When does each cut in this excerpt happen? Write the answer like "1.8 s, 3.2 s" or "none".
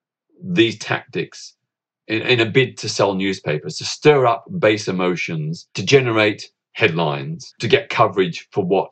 5.8 s, 6.6 s, 7.6 s

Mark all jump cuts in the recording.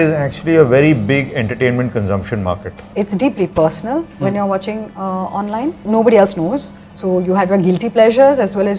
2.8 s, 5.8 s

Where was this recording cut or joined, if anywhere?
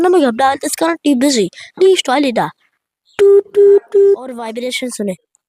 4.5 s

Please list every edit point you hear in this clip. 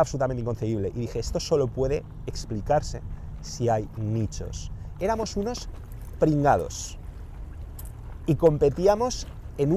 4.3 s

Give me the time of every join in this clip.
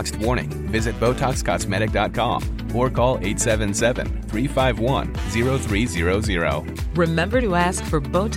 none

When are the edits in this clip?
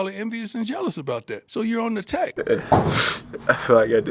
1.4 s, 2.3 s

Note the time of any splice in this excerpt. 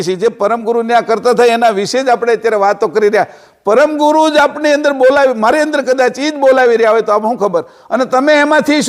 none

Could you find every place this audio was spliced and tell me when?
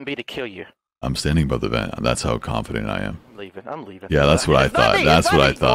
none

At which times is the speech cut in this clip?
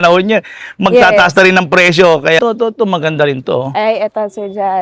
2.4 s

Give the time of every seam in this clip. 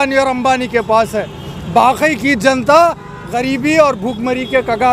none

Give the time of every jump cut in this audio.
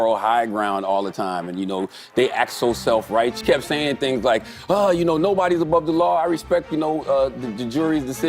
3.4 s

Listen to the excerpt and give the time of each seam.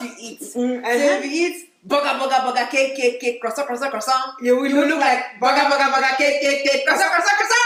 none

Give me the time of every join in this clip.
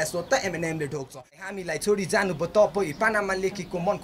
1.3 s

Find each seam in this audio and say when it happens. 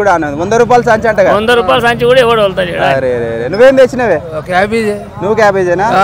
none

